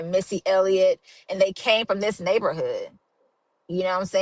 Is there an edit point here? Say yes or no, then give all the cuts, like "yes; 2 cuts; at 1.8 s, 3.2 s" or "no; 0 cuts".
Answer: no; 0 cuts